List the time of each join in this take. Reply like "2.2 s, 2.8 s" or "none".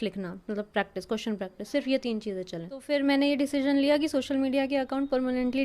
2.8 s